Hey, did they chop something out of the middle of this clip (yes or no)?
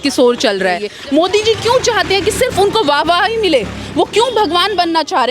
yes